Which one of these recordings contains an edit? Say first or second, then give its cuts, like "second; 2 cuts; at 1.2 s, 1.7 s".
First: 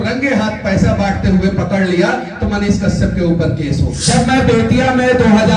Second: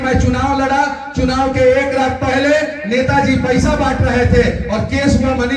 first; 1 cut; at 3.9 s